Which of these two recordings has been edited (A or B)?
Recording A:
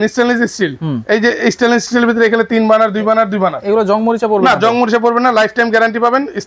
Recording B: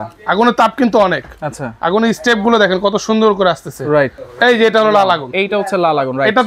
B